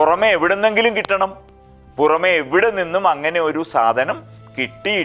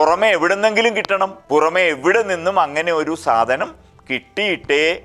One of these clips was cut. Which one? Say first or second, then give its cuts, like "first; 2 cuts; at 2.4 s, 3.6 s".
second; 1 cut; at 1.4 s